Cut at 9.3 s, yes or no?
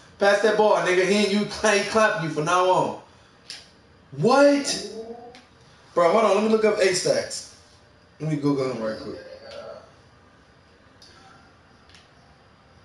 no